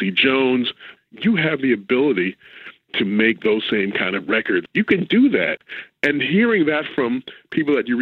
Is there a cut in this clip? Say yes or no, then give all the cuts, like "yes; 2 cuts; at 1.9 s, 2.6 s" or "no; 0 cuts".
yes; 3 cuts; at 0.9 s, 4.7 s, 5.6 s